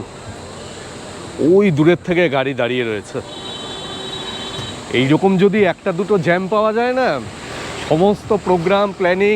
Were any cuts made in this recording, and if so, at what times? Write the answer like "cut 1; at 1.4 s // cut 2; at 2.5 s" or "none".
none